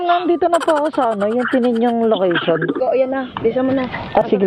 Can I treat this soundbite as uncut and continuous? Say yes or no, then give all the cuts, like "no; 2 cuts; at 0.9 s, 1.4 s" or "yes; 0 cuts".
no; 1 cut; at 2.8 s